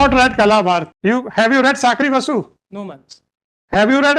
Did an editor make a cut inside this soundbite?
yes; 1 cut; at 0.9 s

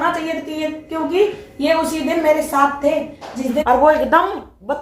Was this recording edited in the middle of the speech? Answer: yes; 1 cut; at 3.6 s

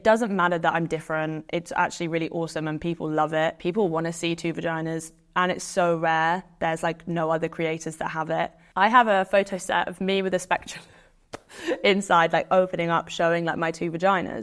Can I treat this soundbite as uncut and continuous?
yes; 0 cuts

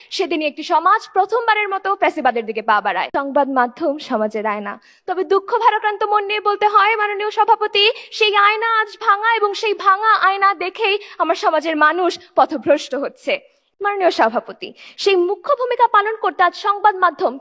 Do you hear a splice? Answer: yes; 2 cuts; at 3.1 s, 13.6 s

